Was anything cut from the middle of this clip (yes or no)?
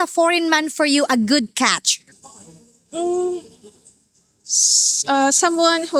no